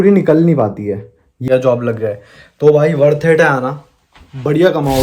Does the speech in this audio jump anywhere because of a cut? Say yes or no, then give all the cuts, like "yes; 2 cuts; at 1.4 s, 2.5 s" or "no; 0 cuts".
yes; 1 cut; at 1.4 s